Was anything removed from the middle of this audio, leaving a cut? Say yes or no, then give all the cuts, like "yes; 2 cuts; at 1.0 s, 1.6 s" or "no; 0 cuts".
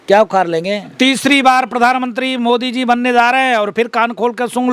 yes; 1 cut; at 0.9 s